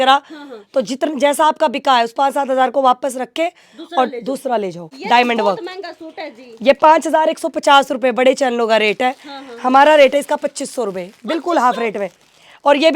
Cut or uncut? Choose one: cut